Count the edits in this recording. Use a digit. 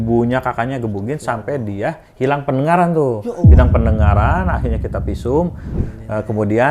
1